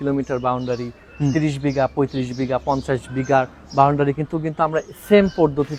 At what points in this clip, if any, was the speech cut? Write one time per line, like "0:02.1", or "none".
none

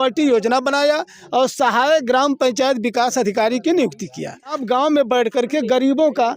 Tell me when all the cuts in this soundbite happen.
0:04.6

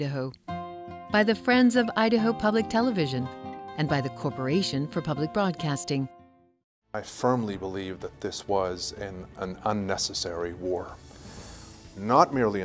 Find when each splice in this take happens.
0:06.9

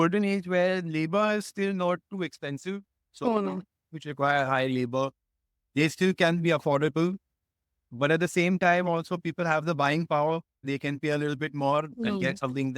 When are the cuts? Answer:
none

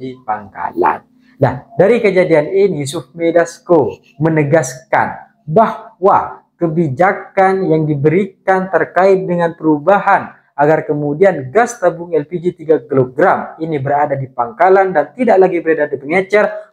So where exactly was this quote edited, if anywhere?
none

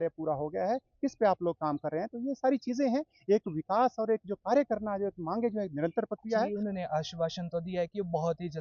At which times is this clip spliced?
0:06.5

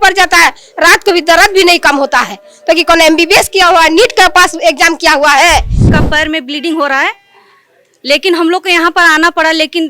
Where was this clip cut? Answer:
0:05.7

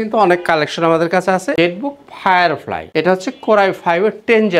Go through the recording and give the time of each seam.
0:01.5
0:02.9

